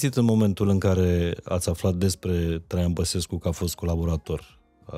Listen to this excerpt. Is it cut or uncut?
uncut